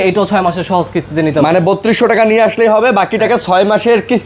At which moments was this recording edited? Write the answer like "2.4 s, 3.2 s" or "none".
none